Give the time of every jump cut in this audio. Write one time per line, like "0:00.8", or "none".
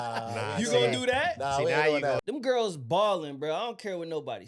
0:02.2